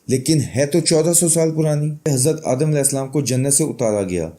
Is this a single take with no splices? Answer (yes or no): no